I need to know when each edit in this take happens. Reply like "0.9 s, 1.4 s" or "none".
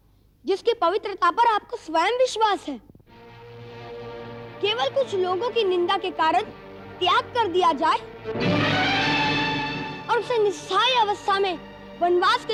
none